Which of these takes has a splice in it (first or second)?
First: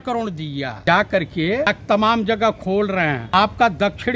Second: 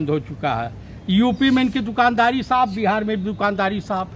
first